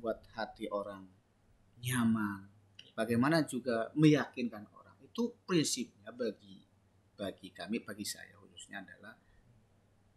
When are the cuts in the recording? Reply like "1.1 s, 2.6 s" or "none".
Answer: none